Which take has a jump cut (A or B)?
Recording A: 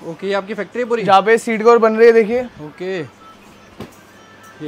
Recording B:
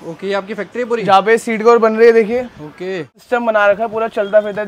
B